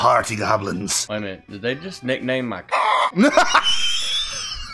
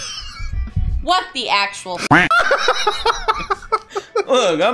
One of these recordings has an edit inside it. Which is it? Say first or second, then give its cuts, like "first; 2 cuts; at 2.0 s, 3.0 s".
first; 1 cut; at 1.0 s